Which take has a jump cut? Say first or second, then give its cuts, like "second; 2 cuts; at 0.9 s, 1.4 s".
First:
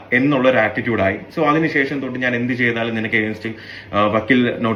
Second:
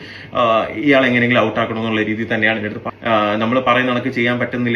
second; 1 cut; at 2.8 s